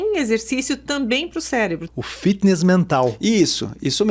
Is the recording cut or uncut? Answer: cut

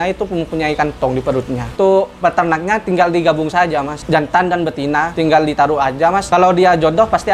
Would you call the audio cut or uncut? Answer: cut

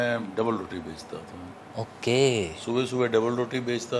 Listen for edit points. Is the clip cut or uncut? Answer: uncut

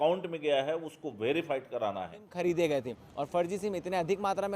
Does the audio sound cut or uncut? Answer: cut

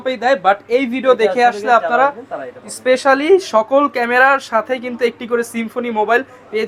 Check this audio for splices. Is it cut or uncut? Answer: uncut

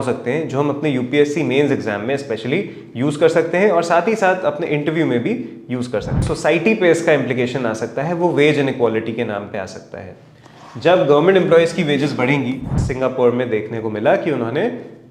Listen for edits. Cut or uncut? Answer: cut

